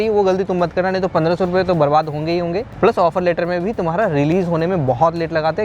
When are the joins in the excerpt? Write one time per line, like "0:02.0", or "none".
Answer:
0:02.7